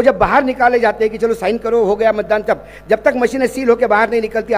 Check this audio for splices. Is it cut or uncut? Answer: uncut